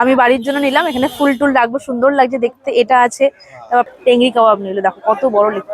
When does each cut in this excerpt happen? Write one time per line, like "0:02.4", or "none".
0:03.9